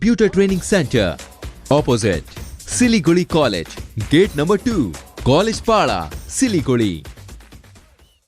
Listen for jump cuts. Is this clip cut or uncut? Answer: uncut